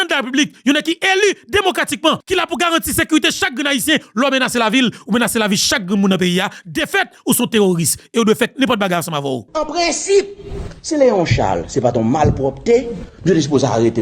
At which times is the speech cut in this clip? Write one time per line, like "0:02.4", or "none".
0:02.2
0:09.5